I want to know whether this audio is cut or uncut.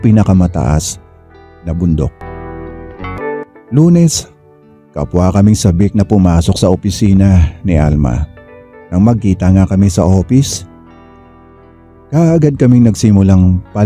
cut